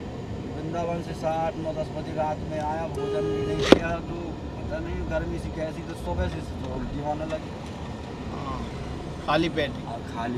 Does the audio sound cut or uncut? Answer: uncut